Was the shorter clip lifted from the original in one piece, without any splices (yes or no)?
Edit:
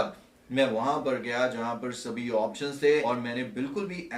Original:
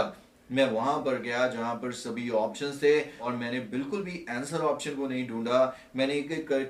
no